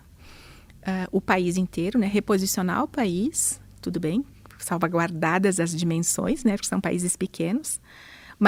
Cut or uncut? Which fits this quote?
uncut